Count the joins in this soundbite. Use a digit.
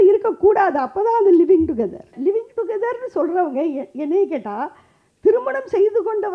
1